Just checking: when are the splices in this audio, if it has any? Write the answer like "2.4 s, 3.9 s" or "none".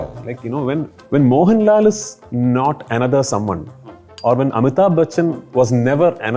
1.0 s